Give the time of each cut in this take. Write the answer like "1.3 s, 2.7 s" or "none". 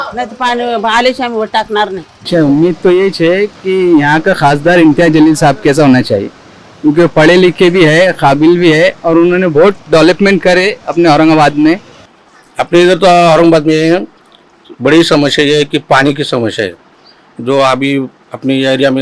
2.1 s